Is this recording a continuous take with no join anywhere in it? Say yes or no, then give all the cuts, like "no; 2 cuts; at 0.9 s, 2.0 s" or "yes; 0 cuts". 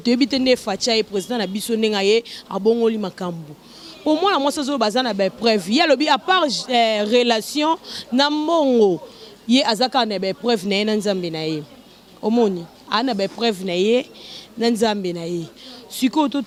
yes; 0 cuts